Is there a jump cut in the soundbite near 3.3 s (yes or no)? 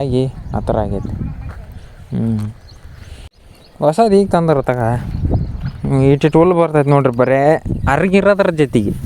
yes